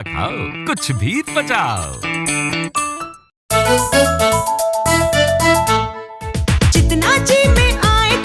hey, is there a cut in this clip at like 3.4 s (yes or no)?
yes